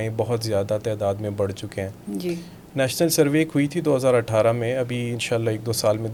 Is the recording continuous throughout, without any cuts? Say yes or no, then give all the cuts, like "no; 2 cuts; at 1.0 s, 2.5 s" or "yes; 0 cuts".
yes; 0 cuts